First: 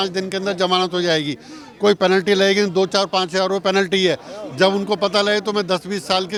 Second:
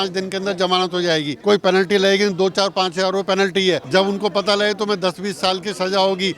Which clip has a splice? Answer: second; 2 cuts; at 1.3 s, 3.8 s

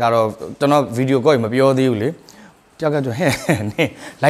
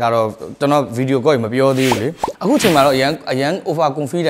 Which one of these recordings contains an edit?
second; 1 cut; at 2.2 s

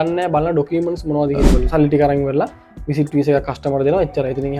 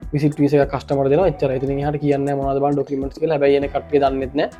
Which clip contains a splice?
first; 1 cut; at 1.6 s

